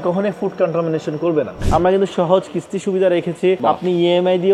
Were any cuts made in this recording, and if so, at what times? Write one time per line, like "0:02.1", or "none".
0:01.6
0:03.6